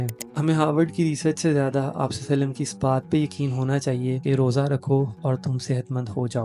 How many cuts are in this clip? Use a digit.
2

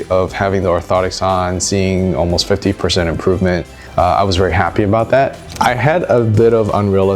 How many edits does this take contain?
2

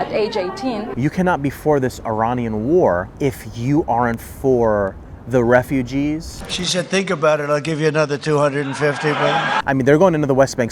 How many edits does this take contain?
3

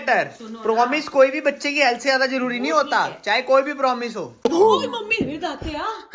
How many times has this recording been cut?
1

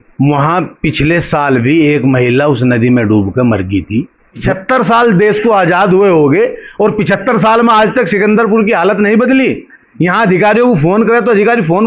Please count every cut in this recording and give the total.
2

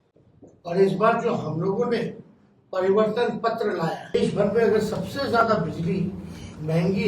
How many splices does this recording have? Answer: 1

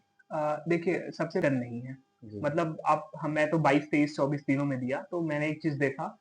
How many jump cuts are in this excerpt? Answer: 1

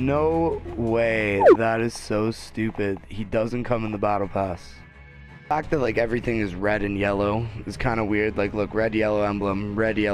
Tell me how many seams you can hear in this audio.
1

